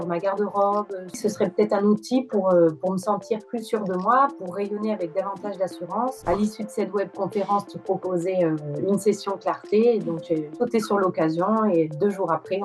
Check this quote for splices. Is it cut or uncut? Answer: cut